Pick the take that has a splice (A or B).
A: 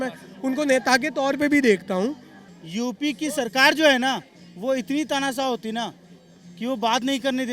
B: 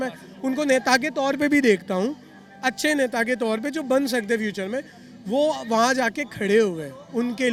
A